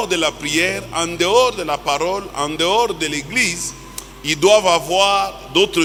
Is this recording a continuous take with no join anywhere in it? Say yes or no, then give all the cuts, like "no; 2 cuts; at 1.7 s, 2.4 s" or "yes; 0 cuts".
yes; 0 cuts